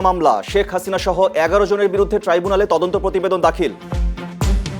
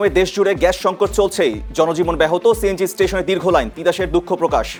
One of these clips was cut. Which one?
first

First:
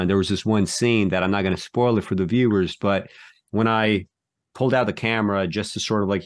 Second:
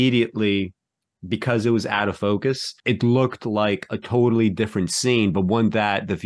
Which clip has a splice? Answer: second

